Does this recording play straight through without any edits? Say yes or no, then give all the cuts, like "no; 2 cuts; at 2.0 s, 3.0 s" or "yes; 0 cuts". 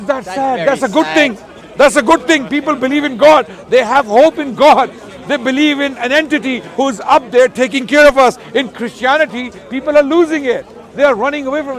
yes; 0 cuts